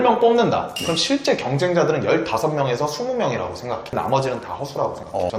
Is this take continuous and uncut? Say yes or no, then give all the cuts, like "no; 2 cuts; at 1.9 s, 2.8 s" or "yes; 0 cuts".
no; 1 cut; at 4.0 s